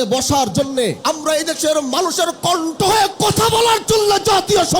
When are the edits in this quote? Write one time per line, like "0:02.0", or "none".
0:01.0